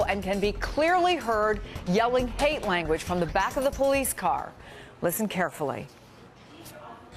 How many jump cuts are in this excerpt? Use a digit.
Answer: 1